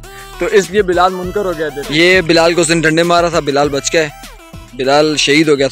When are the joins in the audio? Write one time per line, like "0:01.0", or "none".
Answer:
0:01.5